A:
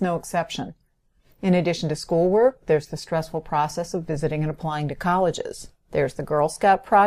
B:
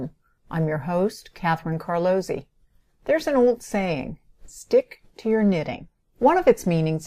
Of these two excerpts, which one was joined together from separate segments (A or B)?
A